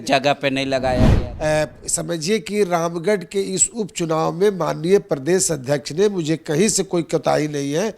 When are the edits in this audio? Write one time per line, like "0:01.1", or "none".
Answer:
0:01.1